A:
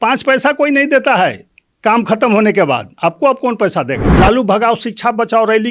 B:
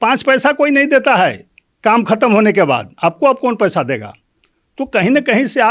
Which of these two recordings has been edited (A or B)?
A